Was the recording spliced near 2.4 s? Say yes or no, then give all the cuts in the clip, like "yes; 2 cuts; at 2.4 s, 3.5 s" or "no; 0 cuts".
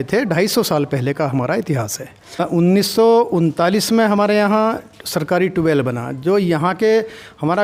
yes; 1 cut; at 2.4 s